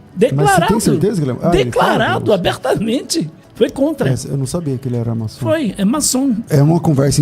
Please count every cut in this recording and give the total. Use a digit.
2